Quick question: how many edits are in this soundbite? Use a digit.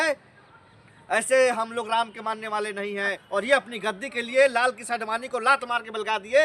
1